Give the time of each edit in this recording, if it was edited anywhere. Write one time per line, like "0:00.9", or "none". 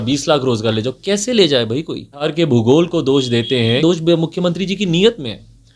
0:02.3
0:03.8